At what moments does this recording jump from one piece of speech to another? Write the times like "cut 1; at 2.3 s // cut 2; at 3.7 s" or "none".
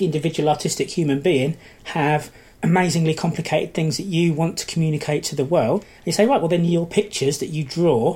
cut 1; at 2.4 s // cut 2; at 5.8 s